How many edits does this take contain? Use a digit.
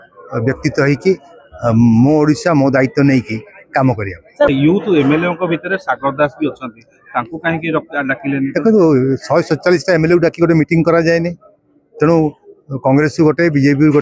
1